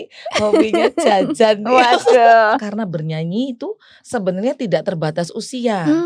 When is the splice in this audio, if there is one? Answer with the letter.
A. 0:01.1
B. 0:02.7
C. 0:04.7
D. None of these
B